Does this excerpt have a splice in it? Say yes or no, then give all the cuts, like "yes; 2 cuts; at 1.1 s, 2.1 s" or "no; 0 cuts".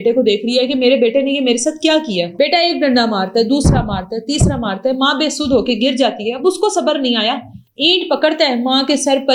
no; 0 cuts